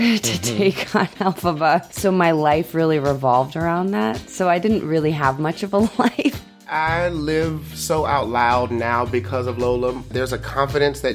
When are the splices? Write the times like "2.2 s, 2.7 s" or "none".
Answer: 1.9 s, 6.6 s, 10.1 s

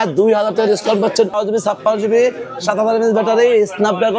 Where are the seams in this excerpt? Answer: 1.3 s

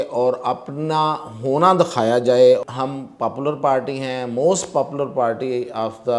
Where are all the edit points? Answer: 2.6 s

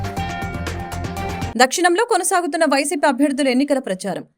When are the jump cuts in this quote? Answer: 1.5 s

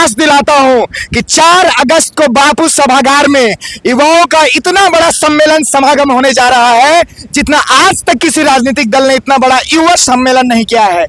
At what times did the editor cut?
none

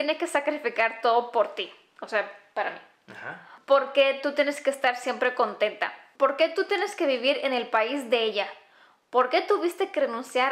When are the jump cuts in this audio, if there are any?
3.5 s, 6.0 s

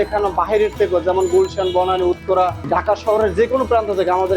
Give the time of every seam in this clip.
2.6 s

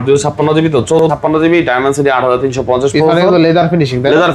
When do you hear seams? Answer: 1.0 s

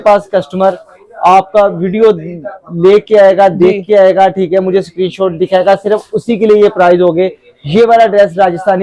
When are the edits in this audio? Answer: none

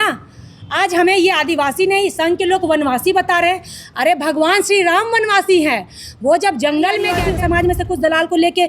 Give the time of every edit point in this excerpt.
7.2 s

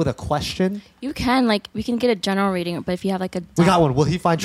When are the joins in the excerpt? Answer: 1.7 s, 3.5 s

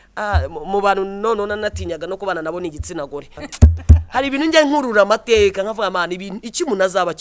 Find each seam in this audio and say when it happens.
3.4 s

